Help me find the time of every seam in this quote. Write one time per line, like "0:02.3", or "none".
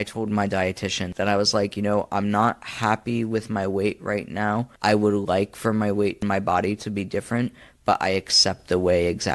0:01.1
0:04.7
0:06.2